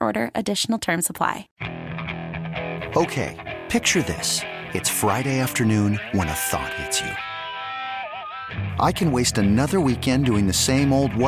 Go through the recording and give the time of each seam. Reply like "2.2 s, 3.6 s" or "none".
1.5 s